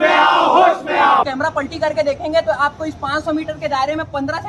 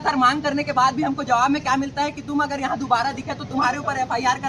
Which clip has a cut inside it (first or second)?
first